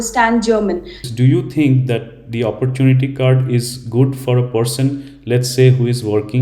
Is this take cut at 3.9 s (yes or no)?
no